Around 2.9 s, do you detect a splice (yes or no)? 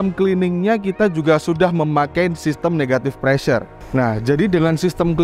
no